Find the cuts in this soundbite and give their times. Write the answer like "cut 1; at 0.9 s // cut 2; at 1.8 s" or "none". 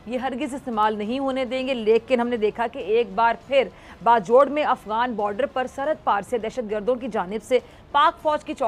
none